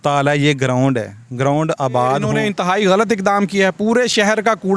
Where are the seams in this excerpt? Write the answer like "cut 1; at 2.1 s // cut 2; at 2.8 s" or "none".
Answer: cut 1; at 2.4 s